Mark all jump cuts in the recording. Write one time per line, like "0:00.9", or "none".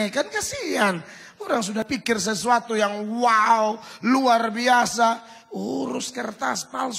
0:01.9